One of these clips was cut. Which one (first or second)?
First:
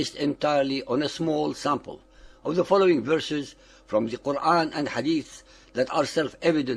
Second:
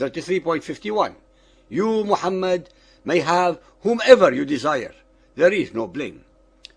first